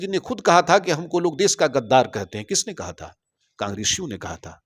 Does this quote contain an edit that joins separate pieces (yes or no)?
no